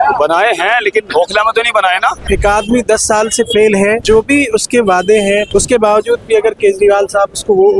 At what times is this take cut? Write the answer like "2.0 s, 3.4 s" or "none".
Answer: 2.2 s, 4.0 s, 5.5 s